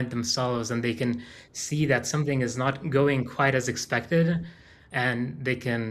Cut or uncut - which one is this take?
cut